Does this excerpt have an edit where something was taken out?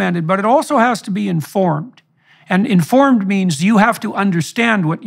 no; 0 cuts

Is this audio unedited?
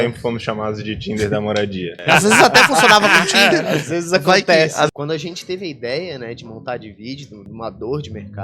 no; 3 cuts; at 2.0 s, 4.9 s, 7.4 s

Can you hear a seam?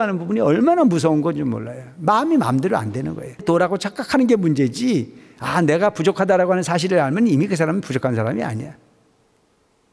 yes; 1 cut; at 3.4 s

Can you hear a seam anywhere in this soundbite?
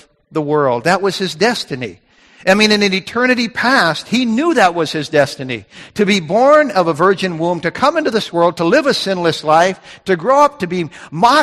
no; 0 cuts

